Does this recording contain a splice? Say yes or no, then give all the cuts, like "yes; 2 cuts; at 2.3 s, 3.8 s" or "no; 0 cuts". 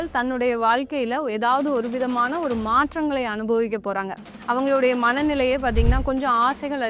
no; 0 cuts